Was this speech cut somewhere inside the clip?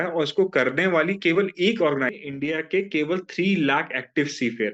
yes; 1 cut; at 2.1 s

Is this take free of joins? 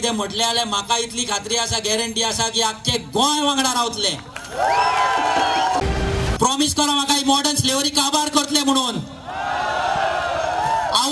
no; 1 cut; at 5.8 s

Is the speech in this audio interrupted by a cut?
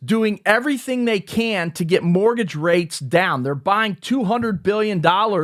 no; 0 cuts

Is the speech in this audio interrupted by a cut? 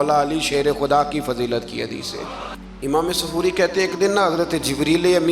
yes; 1 cut; at 2.5 s

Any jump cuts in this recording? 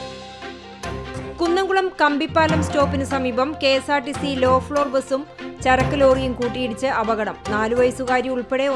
yes; 1 cut; at 1.2 s

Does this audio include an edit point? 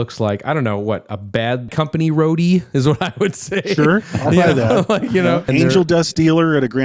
yes; 2 cuts; at 1.7 s, 5.5 s

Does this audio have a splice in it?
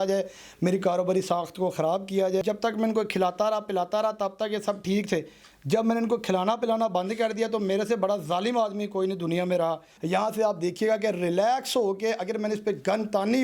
yes; 2 cuts; at 2.4 s, 9.9 s

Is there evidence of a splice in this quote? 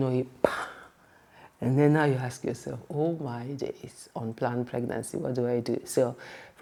no; 0 cuts

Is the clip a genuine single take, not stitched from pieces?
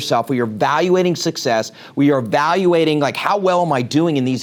yes; 0 cuts

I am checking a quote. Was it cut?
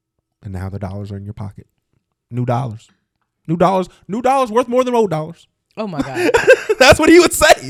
no; 0 cuts

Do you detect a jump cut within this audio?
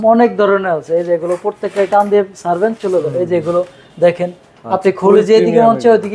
no; 0 cuts

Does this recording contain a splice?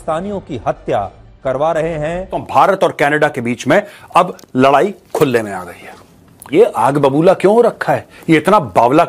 yes; 2 cuts; at 2.5 s, 6.5 s

